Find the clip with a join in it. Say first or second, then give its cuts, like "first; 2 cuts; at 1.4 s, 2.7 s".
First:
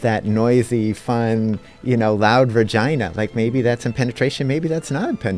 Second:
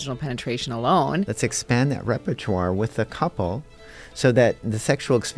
second; 1 cut; at 1.3 s